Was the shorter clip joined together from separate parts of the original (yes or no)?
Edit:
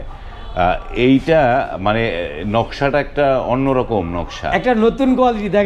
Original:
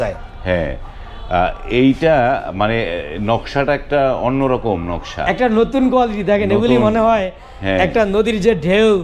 no